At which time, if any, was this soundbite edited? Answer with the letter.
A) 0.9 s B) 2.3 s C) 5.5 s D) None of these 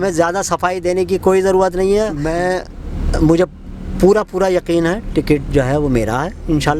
B